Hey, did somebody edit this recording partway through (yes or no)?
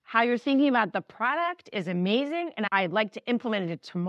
yes